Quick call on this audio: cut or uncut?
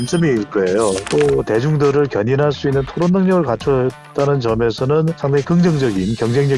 cut